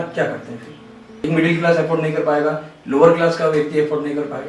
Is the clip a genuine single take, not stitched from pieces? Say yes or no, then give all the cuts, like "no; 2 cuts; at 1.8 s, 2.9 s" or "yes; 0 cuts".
no; 1 cut; at 1.2 s